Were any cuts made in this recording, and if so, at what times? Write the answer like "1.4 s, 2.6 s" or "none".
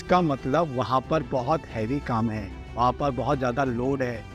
none